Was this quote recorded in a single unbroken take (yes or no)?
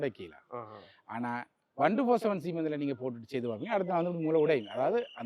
yes